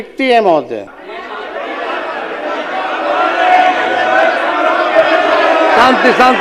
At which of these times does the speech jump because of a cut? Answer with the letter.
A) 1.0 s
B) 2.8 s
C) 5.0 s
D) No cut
A